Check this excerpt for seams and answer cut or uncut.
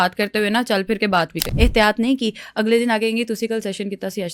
cut